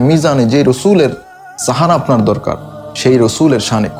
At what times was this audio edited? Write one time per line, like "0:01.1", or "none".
none